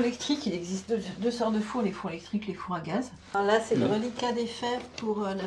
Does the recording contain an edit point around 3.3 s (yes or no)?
yes